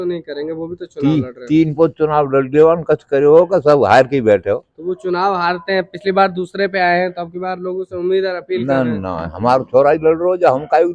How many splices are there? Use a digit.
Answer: 0